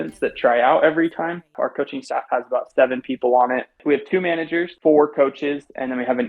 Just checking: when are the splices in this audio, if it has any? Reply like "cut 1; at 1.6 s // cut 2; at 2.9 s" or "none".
cut 1; at 1.5 s // cut 2; at 3.8 s // cut 3; at 4.7 s